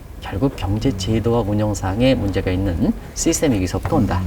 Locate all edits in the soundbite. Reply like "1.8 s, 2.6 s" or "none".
none